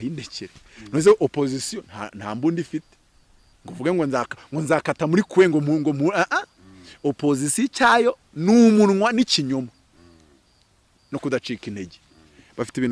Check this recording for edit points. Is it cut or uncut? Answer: uncut